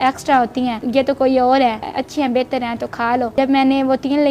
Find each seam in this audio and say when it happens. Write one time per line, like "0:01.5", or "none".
0:00.8
0:02.0
0:03.3